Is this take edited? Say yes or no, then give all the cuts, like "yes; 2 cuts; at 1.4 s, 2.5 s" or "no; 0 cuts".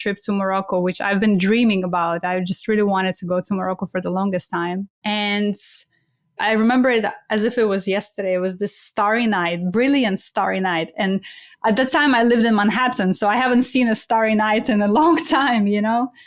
yes; 2 cuts; at 4.9 s, 6.3 s